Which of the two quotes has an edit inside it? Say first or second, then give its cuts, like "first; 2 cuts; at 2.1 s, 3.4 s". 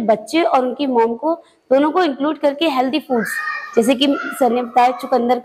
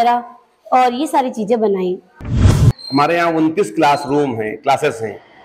second; 1 cut; at 2.7 s